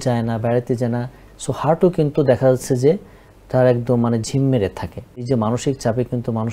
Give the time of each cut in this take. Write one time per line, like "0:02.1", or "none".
0:01.2
0:05.3